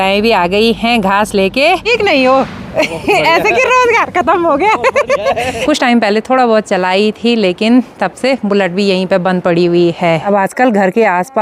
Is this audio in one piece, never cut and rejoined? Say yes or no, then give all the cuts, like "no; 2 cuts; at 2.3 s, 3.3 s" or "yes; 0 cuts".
no; 3 cuts; at 1.8 s, 5.7 s, 10.2 s